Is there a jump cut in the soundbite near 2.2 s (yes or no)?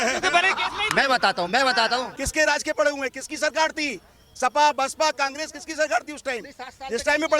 yes